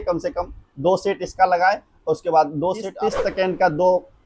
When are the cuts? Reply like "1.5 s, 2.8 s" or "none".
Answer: 2.9 s